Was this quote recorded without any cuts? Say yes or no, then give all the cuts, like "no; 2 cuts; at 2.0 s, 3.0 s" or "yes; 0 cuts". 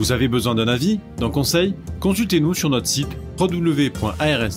yes; 0 cuts